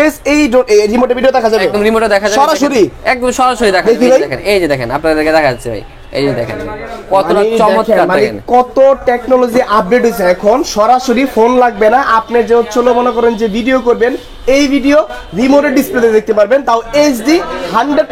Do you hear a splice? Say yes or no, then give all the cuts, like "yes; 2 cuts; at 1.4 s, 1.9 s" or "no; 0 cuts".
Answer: no; 0 cuts